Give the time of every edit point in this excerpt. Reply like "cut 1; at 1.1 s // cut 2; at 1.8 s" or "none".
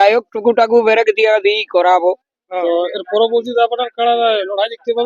cut 1; at 2.6 s